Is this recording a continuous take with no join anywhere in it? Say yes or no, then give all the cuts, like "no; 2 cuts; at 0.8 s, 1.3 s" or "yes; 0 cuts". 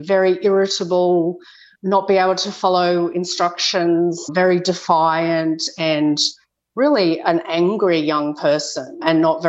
yes; 0 cuts